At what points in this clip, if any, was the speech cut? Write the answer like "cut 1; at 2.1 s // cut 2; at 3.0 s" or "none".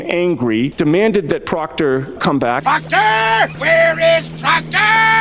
cut 1; at 3.6 s